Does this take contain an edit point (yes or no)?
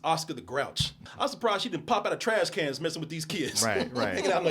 yes